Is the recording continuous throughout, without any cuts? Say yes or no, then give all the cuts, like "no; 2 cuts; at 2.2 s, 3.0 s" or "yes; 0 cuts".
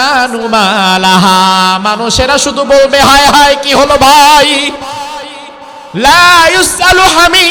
yes; 0 cuts